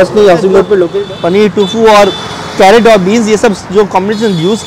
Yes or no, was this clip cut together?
yes